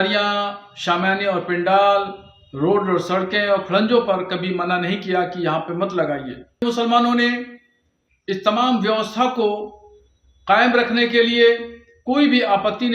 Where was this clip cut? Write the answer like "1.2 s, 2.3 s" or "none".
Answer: 6.6 s